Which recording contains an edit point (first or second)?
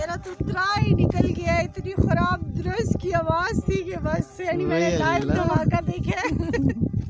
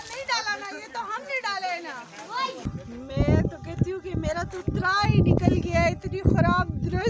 second